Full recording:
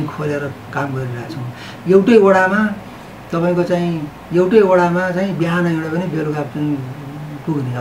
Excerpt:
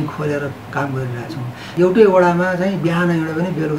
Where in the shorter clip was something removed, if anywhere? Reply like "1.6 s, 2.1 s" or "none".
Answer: 1.6 s